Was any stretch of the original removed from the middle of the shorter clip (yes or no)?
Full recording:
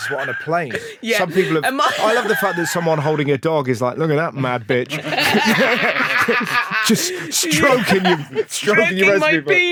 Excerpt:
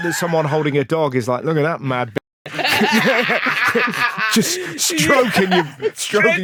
no